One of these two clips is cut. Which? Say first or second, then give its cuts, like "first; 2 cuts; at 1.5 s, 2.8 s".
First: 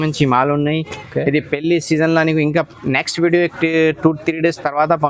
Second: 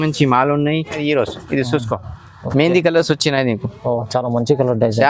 second; 1 cut; at 1.0 s